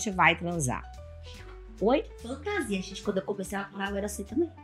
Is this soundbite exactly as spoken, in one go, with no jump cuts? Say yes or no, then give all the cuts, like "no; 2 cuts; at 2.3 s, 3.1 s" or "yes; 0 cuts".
yes; 0 cuts